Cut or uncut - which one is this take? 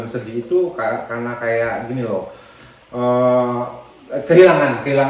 uncut